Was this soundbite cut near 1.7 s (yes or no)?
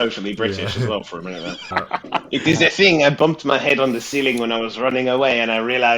yes